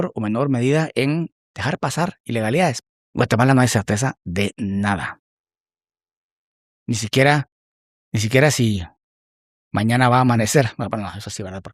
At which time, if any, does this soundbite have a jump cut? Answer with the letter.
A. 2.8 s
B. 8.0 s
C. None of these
A